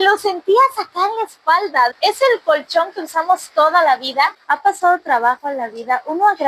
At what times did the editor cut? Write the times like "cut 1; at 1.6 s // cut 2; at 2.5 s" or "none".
cut 1; at 4.4 s